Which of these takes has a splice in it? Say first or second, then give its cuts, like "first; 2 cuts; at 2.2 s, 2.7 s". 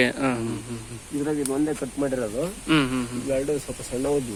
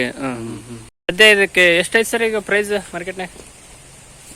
second; 1 cut; at 1.1 s